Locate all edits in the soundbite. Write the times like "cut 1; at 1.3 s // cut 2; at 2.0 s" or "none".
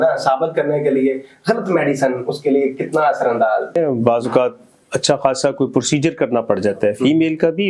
cut 1; at 3.7 s

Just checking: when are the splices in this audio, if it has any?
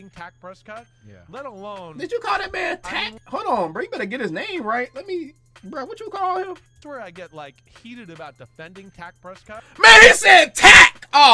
cut 1; at 6.7 s

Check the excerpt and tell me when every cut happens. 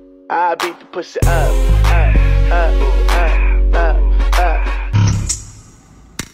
cut 1; at 4.9 s

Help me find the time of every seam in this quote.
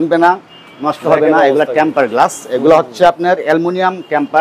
none

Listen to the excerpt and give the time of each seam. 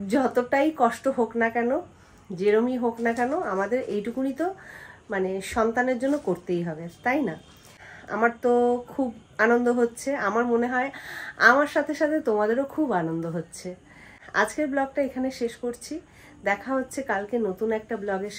none

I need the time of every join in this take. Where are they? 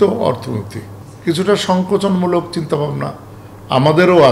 none

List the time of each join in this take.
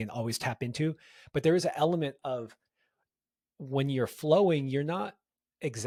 none

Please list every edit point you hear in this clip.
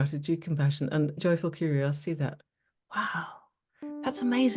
cut 1; at 1.2 s

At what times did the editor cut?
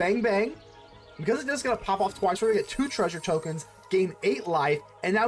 none

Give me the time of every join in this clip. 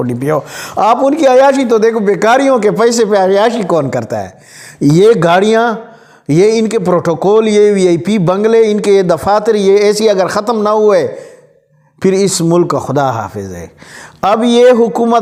none

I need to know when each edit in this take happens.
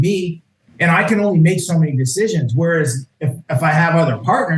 none

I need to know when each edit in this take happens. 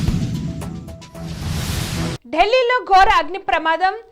cut 1; at 2.2 s

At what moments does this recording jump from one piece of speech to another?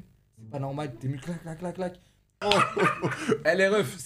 cut 1; at 2.4 s

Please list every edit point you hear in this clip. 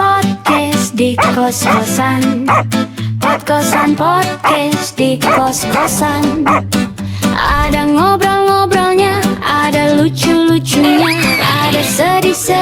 none

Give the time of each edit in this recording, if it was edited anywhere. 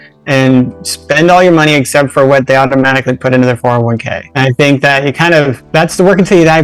cut 1; at 4.2 s // cut 2; at 5.6 s

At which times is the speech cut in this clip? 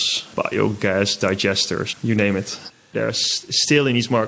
cut 1; at 2.8 s

